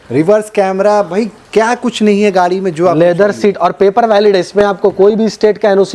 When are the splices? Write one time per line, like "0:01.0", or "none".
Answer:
none